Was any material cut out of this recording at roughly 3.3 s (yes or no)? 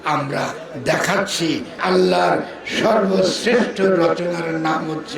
no